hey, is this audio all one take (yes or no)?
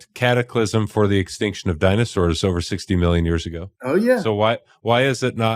yes